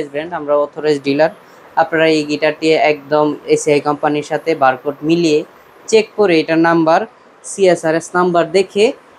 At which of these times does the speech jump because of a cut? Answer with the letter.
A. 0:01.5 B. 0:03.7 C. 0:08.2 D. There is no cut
D